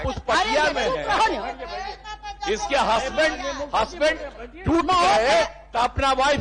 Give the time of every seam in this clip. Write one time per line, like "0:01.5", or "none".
none